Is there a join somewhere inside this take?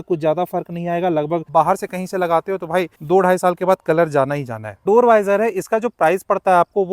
yes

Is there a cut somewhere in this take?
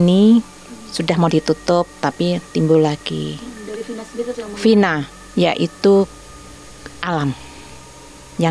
no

